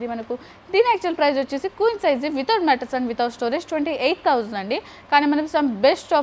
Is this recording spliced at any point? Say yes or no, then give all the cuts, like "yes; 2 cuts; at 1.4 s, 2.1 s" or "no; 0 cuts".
no; 0 cuts